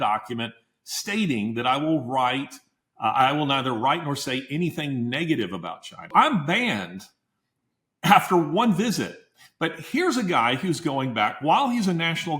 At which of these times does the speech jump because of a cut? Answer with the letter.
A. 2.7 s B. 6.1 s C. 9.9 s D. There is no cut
B